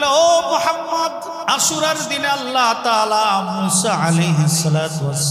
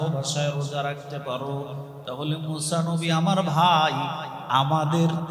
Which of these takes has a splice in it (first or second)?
first